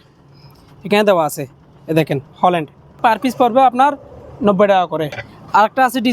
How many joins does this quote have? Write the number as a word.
two